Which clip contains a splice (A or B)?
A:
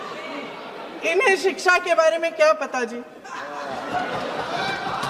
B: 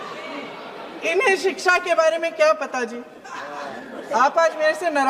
B